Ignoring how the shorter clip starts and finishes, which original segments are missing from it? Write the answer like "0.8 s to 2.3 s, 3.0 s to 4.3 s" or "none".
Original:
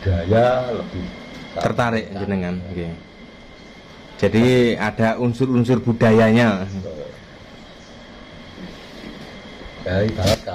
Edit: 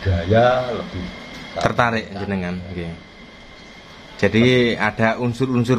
none